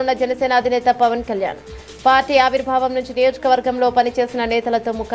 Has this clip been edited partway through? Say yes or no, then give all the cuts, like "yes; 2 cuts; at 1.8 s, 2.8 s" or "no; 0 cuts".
no; 0 cuts